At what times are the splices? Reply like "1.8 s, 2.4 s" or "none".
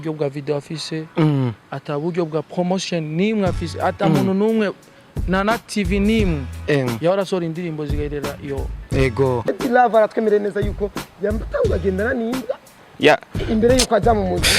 9.6 s